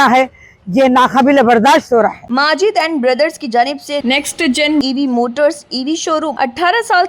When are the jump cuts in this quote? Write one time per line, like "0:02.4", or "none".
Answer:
0:02.2
0:06.3